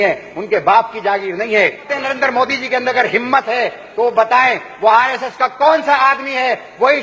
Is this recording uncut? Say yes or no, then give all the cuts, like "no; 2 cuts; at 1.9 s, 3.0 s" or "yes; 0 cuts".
no; 1 cut; at 1.9 s